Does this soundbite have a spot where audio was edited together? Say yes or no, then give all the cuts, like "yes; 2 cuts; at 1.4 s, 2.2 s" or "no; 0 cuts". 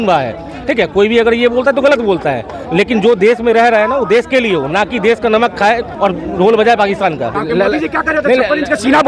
yes; 3 cuts; at 2.5 s, 5.9 s, 7.3 s